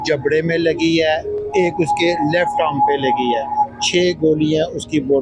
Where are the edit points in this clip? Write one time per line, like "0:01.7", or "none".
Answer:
none